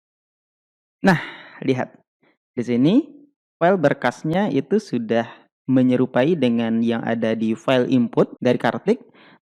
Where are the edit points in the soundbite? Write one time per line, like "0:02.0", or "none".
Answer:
none